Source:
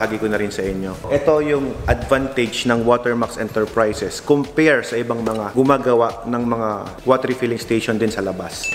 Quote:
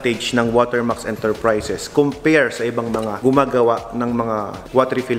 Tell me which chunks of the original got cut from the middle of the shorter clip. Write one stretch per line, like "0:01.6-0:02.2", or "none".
none

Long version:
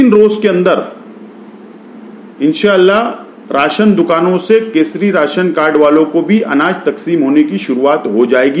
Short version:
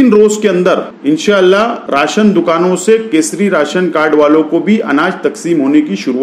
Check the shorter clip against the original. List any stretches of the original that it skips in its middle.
0:00.9-0:02.3
0:03.2-0:03.4

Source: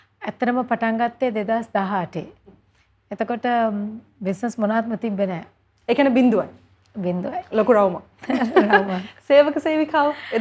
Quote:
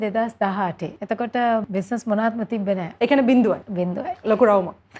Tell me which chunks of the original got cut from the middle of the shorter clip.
0:02.2-0:03.0
0:03.7-0:04.2
0:05.4-0:05.8
0:06.6-0:07.0

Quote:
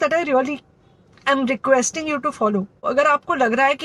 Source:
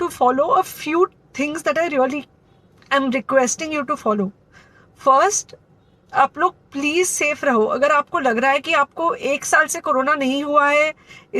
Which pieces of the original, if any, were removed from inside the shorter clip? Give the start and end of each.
0:04.5-0:07.7

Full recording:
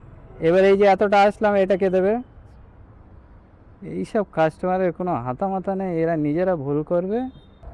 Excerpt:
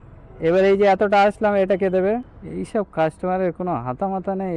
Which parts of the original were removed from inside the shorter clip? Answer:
0:02.4-0:03.8

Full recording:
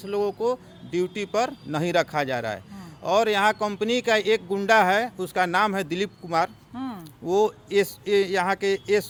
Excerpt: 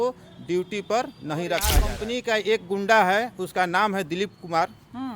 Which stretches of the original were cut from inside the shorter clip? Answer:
0:02.3-0:03.7

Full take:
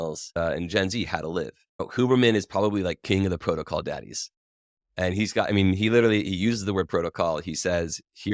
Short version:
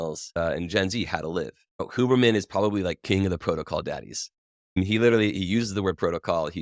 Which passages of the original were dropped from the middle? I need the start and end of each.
0:04.8-0:05.7

